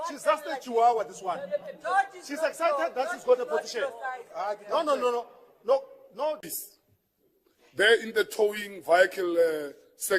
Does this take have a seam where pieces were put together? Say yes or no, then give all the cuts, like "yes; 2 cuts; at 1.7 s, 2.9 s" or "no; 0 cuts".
yes; 1 cut; at 6.4 s